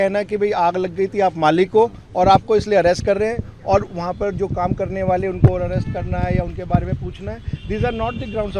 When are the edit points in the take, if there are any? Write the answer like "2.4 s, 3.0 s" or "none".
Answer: none